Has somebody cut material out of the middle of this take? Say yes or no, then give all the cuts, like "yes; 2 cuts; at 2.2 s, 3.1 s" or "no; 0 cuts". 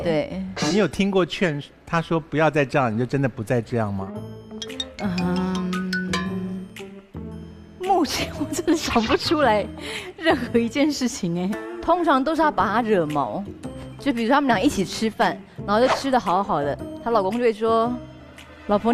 no; 0 cuts